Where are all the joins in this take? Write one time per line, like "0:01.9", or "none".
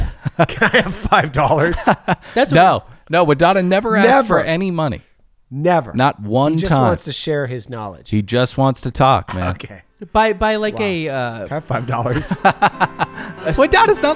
0:13.3